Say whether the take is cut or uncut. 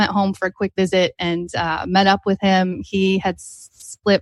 uncut